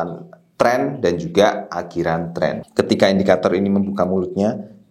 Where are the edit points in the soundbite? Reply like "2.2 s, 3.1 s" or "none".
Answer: 2.6 s